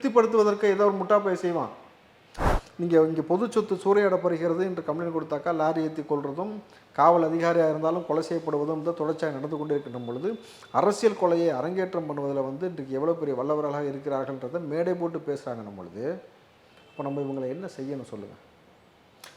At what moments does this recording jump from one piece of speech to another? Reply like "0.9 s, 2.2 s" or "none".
2.5 s